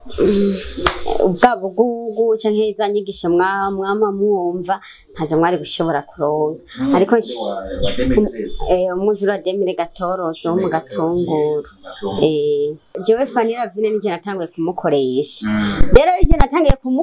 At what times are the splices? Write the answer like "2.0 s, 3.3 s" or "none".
13.0 s